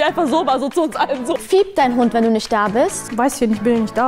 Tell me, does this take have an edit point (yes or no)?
yes